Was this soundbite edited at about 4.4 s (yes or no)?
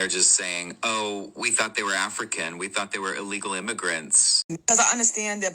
yes